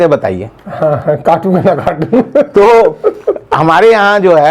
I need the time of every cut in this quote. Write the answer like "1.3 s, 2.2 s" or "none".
none